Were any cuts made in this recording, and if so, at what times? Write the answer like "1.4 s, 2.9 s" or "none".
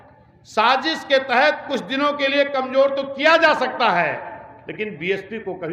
none